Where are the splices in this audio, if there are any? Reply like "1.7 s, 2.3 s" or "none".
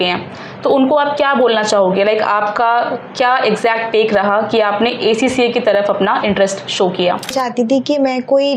7.3 s